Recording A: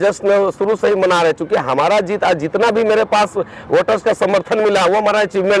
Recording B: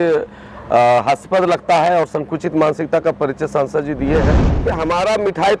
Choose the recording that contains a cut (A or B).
B